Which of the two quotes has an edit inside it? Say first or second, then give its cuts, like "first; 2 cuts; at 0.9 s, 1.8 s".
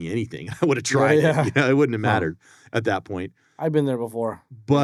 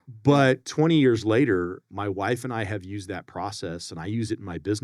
second; 1 cut; at 1.9 s